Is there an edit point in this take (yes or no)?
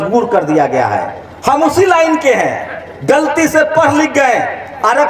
no